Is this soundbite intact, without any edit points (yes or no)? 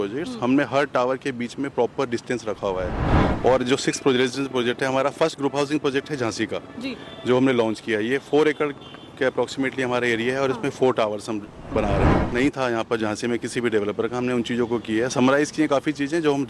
no